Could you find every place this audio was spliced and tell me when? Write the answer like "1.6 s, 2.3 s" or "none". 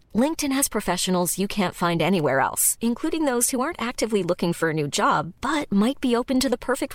none